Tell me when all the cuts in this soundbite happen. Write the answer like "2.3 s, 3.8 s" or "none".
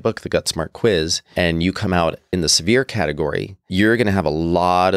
1.2 s, 2.2 s, 3.5 s